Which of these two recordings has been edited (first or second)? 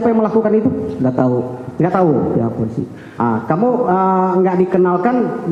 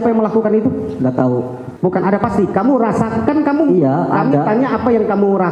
second